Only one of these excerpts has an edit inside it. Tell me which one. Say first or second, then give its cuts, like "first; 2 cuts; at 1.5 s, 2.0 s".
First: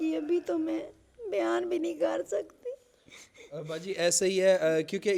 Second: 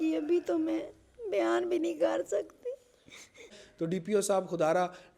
second; 1 cut; at 3.6 s